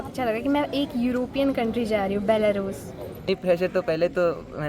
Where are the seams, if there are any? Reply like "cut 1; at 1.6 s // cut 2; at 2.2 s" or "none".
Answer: cut 1; at 3.1 s

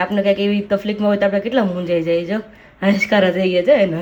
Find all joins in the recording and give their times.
none

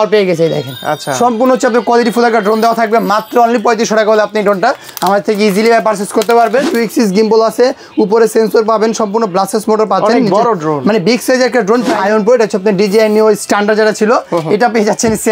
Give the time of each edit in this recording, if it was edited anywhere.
cut 1; at 6.7 s // cut 2; at 11.9 s

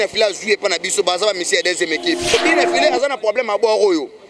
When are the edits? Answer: cut 1; at 2.3 s

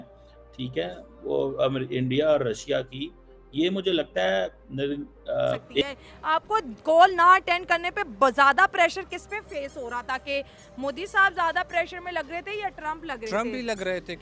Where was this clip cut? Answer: cut 1; at 5.8 s

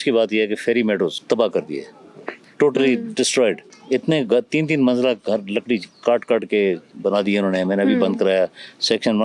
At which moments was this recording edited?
cut 1; at 1.2 s // cut 2; at 3.7 s

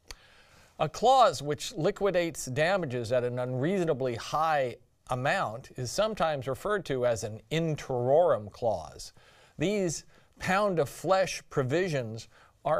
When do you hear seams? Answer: none

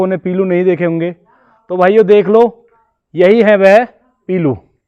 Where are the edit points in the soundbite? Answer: none

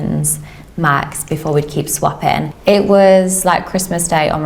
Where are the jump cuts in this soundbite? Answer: cut 1; at 2.5 s

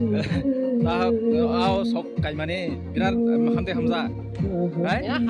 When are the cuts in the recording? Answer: none

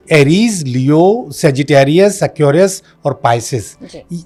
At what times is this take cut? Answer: none

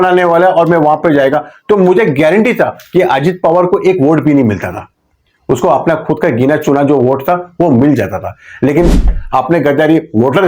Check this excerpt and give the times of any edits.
cut 1; at 9.2 s

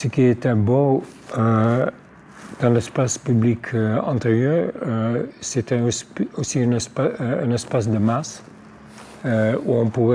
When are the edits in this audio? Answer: none

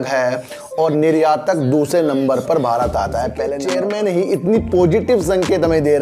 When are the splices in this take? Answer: cut 1; at 3.6 s

